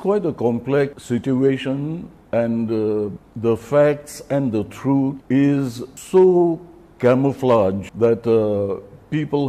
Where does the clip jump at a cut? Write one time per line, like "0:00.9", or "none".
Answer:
0:01.0
0:02.1
0:03.2
0:05.2
0:05.9
0:07.9